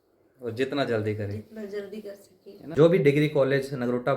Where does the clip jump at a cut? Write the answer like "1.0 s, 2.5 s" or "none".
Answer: 2.7 s